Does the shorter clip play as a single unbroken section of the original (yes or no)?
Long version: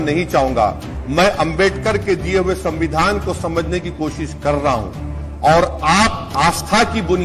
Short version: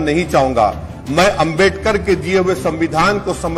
yes